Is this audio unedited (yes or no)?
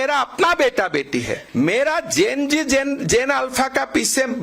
no